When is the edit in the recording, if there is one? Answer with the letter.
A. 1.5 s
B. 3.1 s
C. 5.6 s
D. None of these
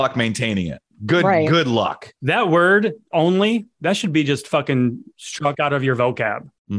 B